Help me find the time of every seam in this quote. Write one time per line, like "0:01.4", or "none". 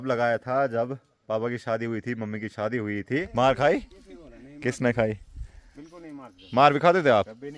0:03.3